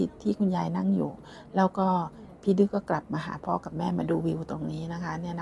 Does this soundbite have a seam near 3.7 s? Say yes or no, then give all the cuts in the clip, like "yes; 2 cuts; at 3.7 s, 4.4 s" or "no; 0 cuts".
no; 0 cuts